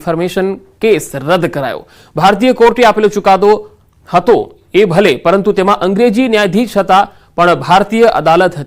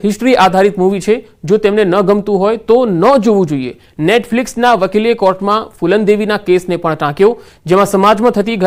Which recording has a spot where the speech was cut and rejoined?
first; 1 cut; at 6.0 s

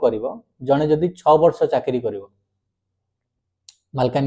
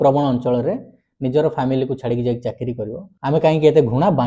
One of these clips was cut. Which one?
second; 1 cut; at 3.0 s

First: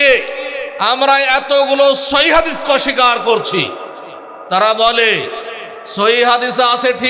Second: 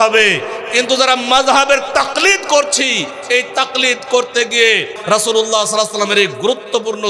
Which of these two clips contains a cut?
second; 1 cut; at 4.9 s

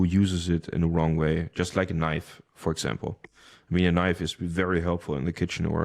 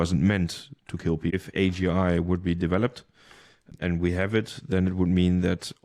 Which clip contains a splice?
second; 1 cut; at 1.3 s

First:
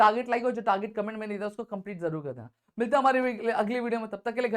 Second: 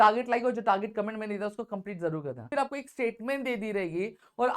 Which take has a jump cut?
second; 1 cut; at 2.5 s

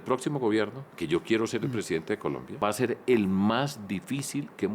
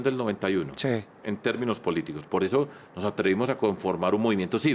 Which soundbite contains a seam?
first; 1 cut; at 2.6 s

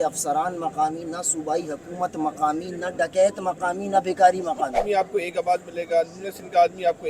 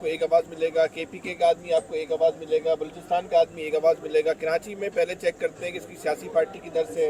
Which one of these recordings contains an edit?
first; 1 cut; at 4.8 s

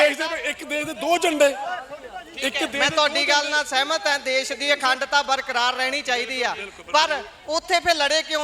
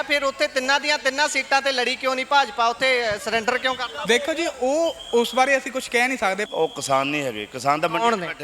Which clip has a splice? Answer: second; 1 cut; at 6.5 s

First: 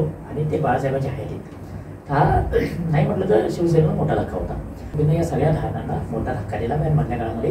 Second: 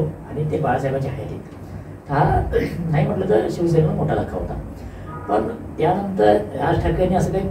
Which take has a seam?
first; 1 cut; at 4.9 s

